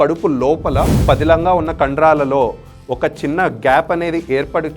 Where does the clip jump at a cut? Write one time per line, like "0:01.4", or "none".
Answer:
0:00.9